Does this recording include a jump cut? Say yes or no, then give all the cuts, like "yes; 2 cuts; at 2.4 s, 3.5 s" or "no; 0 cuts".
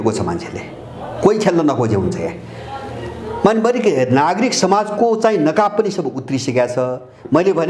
no; 0 cuts